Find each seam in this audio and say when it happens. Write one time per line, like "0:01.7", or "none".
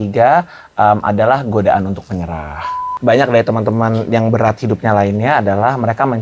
0:02.9